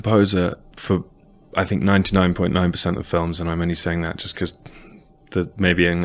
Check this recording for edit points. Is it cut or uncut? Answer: uncut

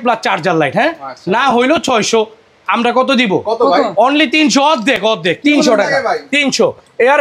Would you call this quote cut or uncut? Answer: uncut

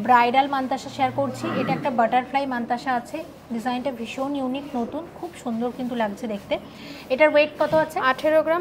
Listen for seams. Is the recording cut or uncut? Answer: uncut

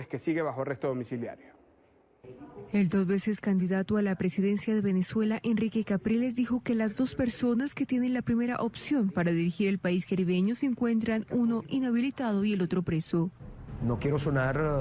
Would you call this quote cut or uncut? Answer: cut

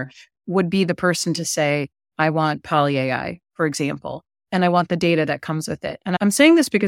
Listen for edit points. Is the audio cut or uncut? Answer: uncut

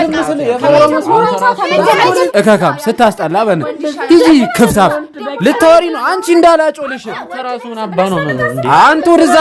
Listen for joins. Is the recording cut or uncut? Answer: cut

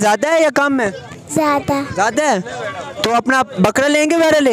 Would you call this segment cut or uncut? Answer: uncut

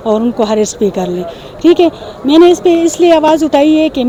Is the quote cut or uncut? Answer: uncut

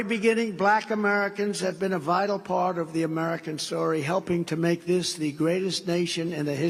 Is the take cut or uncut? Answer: uncut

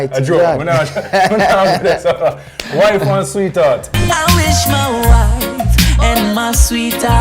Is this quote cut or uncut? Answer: cut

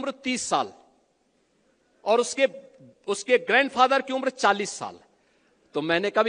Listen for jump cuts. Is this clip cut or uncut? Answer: uncut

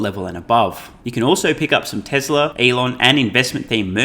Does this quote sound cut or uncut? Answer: cut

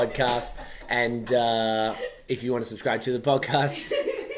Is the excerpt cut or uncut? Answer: uncut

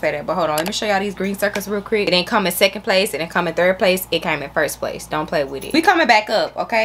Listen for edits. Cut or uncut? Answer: cut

